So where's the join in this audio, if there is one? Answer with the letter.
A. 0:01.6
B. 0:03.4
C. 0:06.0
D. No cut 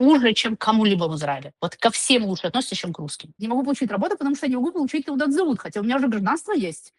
B